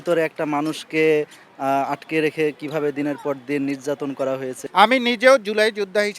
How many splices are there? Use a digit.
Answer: 1